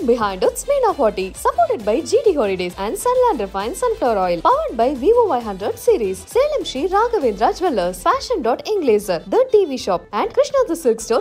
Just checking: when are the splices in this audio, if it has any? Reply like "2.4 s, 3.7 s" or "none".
none